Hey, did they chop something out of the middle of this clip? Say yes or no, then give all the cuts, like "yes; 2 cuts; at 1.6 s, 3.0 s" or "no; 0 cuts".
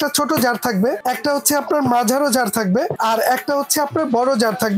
yes; 2 cuts; at 1.0 s, 2.9 s